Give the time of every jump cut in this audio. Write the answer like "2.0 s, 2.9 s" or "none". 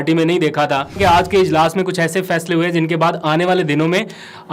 1.0 s